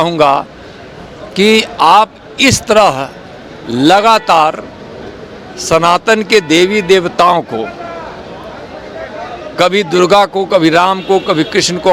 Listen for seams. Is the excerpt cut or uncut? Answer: uncut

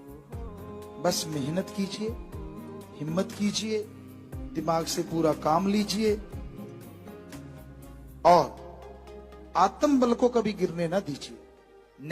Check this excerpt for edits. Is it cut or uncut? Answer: cut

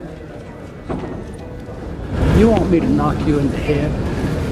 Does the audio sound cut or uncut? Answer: uncut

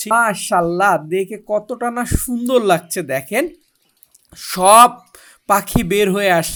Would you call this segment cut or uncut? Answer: uncut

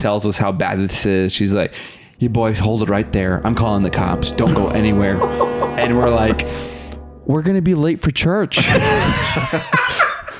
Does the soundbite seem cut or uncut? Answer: uncut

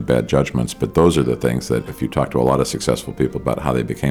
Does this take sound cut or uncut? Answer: cut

